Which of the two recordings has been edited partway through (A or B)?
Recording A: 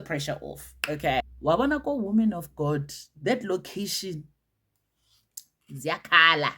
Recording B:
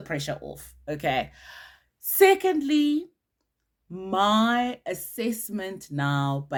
A